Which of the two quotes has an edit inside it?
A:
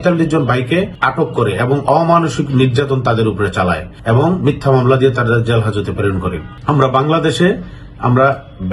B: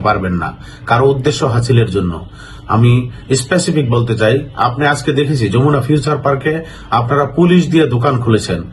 A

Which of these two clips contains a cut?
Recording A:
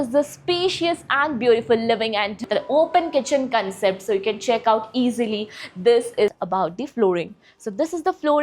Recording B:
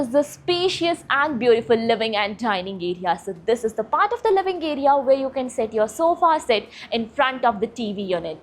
A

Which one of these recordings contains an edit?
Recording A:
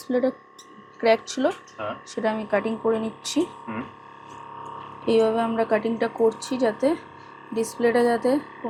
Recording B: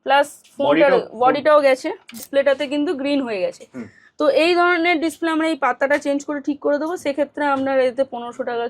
B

